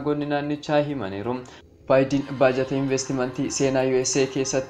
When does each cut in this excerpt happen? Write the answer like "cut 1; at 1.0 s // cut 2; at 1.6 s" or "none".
cut 1; at 1.5 s

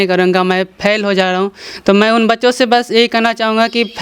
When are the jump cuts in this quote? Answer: none

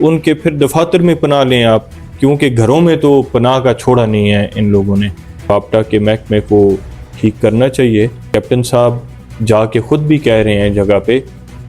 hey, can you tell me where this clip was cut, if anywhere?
cut 1; at 5.5 s // cut 2; at 8.2 s

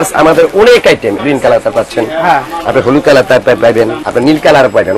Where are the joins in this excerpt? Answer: cut 1; at 1.2 s // cut 2; at 4.0 s

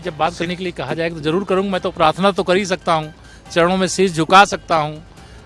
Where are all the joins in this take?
none

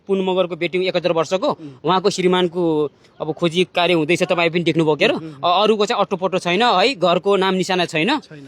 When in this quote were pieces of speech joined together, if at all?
none

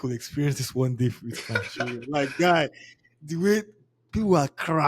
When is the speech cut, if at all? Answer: none

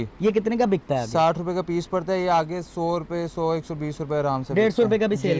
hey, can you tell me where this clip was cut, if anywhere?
none

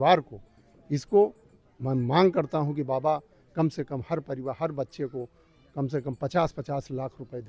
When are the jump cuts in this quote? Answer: none

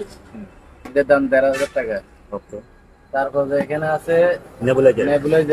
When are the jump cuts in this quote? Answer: none

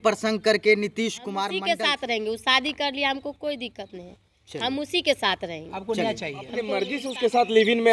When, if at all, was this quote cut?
cut 1; at 1.5 s // cut 2; at 6.7 s

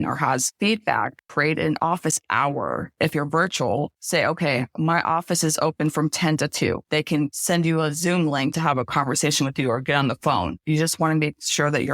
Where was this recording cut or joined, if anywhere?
cut 1; at 1.2 s // cut 2; at 2.9 s // cut 3; at 7.1 s // cut 4; at 8.6 s

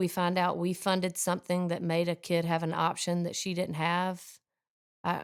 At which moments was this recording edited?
none

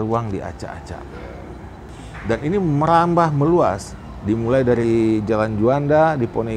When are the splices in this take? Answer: cut 1; at 1.9 s

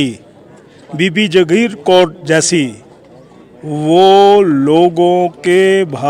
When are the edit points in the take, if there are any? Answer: none

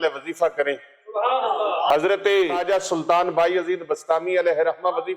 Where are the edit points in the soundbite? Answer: cut 1; at 1.9 s // cut 2; at 2.6 s

